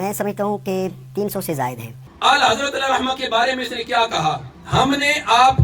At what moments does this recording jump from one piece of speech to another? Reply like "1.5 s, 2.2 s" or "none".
2.0 s, 4.5 s